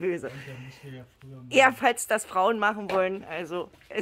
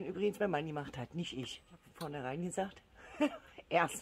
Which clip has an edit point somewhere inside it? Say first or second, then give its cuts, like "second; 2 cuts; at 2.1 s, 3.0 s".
second; 1 cut; at 1.8 s